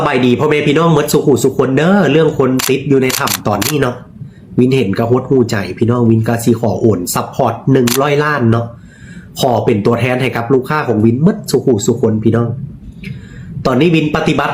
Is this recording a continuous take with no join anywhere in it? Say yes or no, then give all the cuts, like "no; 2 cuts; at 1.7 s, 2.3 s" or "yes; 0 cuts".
yes; 0 cuts